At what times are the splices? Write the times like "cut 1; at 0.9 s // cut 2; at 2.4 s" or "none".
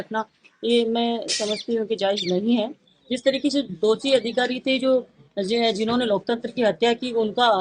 cut 1; at 2.9 s